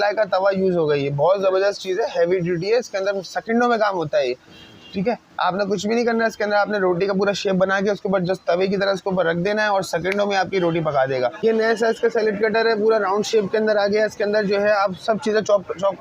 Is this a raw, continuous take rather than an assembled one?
no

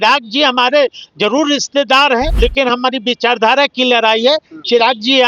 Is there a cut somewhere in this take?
yes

